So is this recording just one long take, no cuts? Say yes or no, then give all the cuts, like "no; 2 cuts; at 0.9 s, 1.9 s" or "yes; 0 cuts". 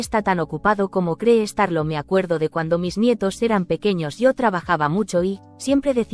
yes; 0 cuts